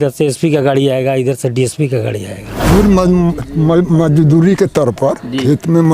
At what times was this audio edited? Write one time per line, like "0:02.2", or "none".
0:02.7